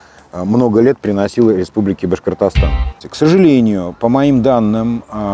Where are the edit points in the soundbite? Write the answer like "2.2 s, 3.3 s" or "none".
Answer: 3.0 s